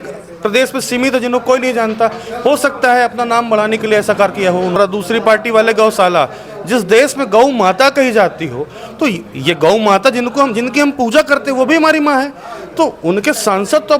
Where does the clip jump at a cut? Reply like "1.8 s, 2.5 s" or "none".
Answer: 4.8 s